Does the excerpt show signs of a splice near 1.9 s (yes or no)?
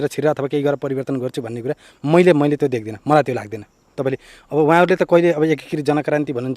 no